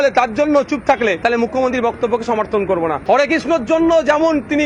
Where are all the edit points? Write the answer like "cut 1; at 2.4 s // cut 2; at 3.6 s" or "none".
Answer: cut 1; at 1.2 s // cut 2; at 3.0 s